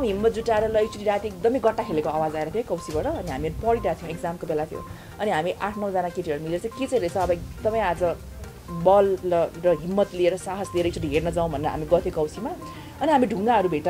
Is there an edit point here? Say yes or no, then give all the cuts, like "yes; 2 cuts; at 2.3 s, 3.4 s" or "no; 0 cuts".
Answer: no; 0 cuts